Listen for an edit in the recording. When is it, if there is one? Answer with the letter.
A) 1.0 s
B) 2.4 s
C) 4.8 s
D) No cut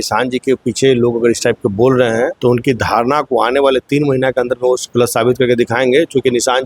B